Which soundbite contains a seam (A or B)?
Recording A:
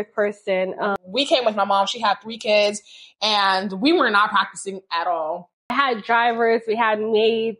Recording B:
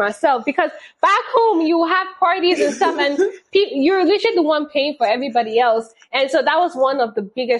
A